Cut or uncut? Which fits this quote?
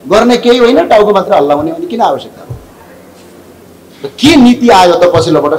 uncut